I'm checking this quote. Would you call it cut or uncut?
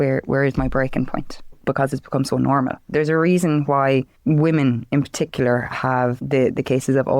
cut